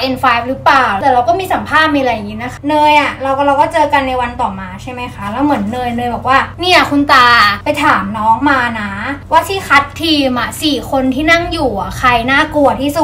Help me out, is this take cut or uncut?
cut